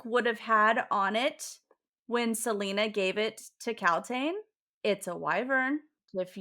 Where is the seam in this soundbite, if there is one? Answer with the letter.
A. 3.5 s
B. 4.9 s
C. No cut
C